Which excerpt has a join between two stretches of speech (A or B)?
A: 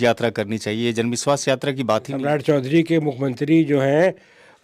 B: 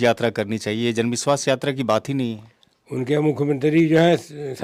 A